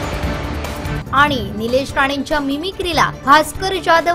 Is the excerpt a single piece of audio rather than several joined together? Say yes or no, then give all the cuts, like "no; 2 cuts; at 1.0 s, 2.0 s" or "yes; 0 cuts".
yes; 0 cuts